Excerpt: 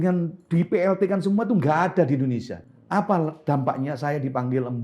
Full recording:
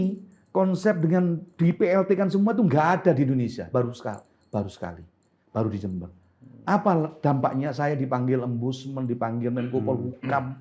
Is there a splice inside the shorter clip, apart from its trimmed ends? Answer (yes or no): yes